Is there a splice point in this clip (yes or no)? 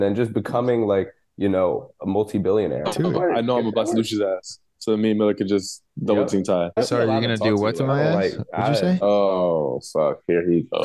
yes